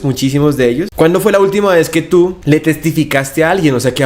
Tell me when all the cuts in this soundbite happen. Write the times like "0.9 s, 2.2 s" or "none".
0.9 s, 2.4 s